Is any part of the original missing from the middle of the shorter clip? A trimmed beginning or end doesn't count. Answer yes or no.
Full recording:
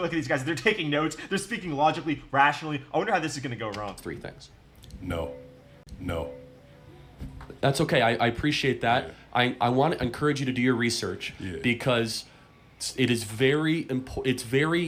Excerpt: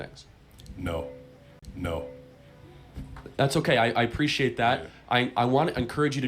no